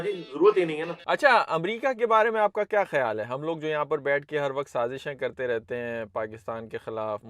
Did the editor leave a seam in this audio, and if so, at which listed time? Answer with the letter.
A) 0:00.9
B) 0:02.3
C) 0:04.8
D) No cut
A